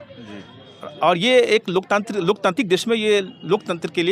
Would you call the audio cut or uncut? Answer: uncut